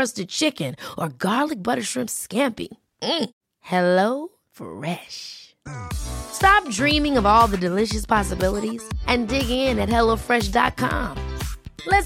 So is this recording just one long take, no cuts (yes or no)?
yes